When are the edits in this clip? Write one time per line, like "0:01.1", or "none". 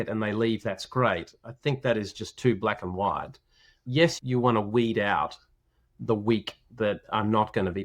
0:04.2